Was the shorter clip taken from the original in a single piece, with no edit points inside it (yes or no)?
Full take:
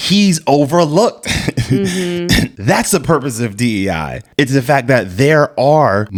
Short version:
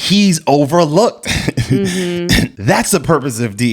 yes